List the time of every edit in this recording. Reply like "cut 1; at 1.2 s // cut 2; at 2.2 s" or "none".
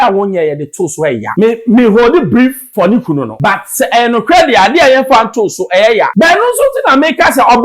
cut 1; at 1.3 s // cut 2; at 2.6 s // cut 3; at 3.3 s // cut 4; at 6.1 s